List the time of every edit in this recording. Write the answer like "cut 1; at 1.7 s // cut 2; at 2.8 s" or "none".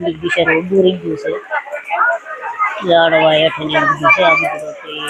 none

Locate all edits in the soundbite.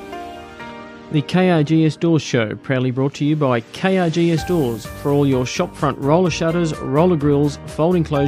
cut 1; at 1.0 s

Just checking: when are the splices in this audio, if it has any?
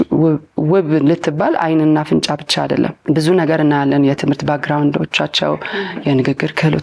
cut 1; at 3.0 s

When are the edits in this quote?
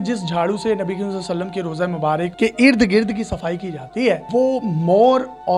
cut 1; at 2.3 s // cut 2; at 4.2 s

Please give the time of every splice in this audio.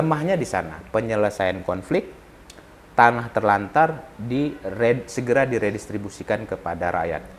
none

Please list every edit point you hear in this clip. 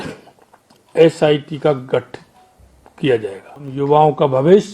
cut 1; at 3.7 s

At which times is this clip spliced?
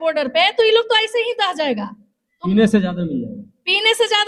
none

